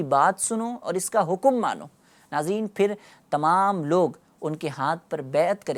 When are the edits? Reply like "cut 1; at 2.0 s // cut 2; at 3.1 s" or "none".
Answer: none